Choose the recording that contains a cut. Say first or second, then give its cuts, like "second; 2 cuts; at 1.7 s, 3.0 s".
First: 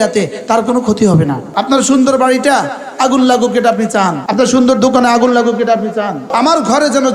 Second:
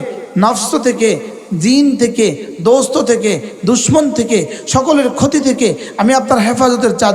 first; 3 cuts; at 1.5 s, 4.2 s, 6.2 s